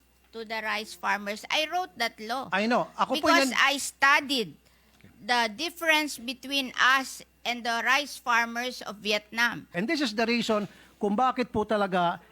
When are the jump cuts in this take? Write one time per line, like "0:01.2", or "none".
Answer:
0:09.7